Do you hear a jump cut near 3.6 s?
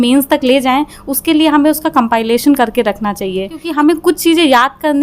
yes; 1 cut; at 3.6 s

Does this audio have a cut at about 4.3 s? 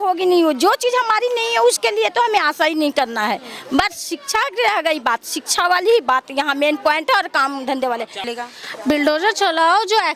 no; 1 cut; at 8.2 s

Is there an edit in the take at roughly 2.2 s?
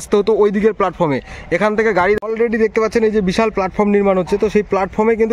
yes; 1 cut; at 2.2 s

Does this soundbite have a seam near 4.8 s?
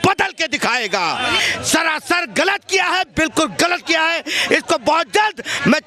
no; 1 cut; at 1.4 s

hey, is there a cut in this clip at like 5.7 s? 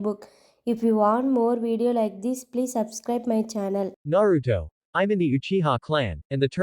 no; 1 cut; at 4.0 s

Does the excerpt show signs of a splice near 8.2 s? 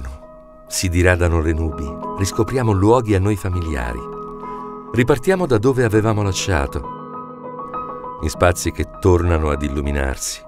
yes; 1 cut; at 8.2 s

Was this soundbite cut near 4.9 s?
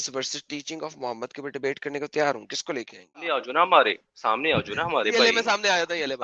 no; 1 cut; at 3.5 s

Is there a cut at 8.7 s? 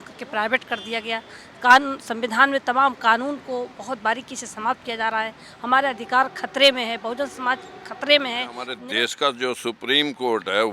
yes; 1 cut; at 8.7 s

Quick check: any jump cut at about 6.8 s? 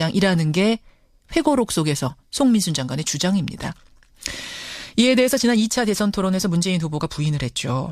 yes; 1 cut; at 6.8 s

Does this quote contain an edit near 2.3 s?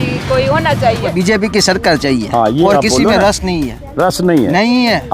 no; 1 cut; at 1.1 s

